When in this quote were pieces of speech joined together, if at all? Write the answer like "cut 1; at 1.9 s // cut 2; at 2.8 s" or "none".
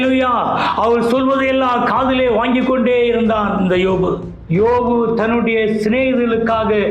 cut 1; at 4.4 s